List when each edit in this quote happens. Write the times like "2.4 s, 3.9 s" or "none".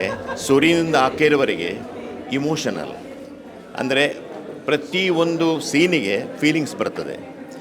none